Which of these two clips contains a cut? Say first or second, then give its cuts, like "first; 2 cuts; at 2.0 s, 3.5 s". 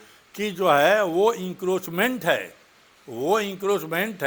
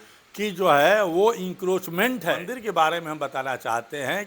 second; 1 cut; at 2.5 s